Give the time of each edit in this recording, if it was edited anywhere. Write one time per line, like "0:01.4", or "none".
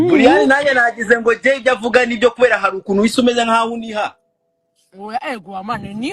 none